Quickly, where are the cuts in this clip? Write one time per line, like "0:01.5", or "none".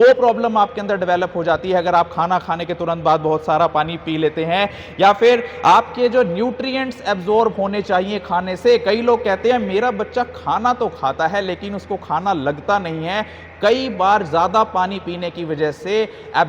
none